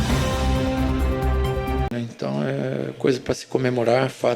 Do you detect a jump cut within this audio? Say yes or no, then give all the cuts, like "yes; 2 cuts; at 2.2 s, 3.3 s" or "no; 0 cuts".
yes; 1 cut; at 1.9 s